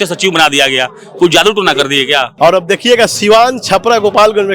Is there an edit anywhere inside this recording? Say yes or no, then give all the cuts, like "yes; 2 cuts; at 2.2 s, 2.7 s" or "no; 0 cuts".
yes; 1 cut; at 2.3 s